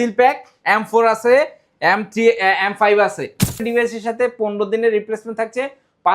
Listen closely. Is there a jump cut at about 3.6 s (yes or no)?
yes